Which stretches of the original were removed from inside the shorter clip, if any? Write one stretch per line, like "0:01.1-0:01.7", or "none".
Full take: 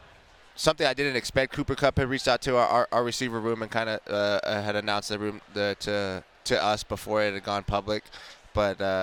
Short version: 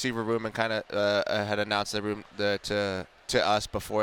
none